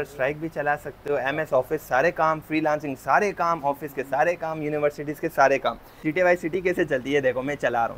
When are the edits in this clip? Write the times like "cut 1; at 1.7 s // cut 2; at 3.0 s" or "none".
cut 1; at 6.0 s